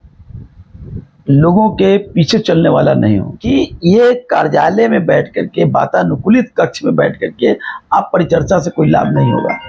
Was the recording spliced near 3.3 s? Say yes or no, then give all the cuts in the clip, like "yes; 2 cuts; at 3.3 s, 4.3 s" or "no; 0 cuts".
yes; 1 cut; at 3.3 s